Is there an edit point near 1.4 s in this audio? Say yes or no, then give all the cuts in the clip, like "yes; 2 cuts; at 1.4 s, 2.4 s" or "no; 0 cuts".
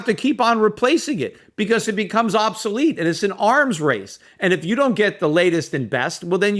no; 0 cuts